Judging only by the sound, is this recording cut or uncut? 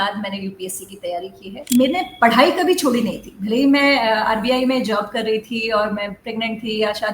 cut